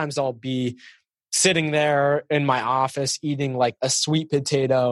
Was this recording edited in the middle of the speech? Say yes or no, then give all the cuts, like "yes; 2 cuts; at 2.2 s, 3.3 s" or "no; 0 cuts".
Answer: yes; 1 cut; at 3.8 s